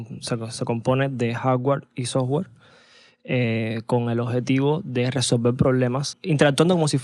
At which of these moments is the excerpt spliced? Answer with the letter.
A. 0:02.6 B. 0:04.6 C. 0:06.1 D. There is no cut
C